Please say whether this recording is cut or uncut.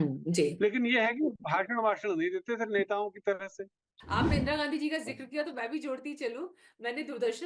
cut